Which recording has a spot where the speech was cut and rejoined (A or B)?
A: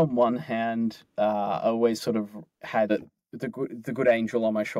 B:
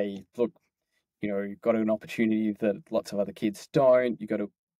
A